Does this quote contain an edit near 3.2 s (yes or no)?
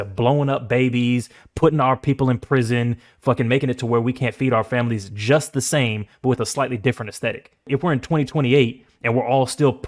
no